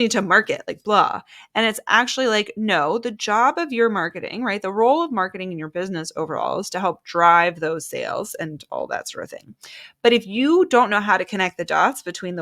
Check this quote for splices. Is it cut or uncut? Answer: uncut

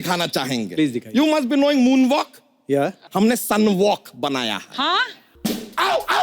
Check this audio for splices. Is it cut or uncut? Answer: cut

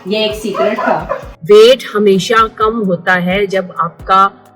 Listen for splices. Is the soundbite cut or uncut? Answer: cut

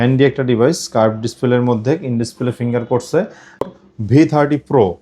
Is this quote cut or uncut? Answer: cut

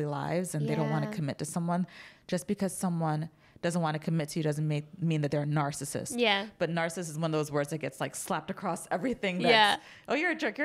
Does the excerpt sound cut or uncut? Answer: uncut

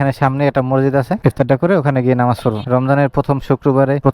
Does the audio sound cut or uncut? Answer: cut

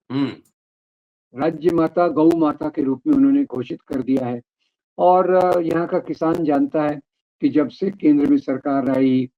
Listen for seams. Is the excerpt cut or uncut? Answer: uncut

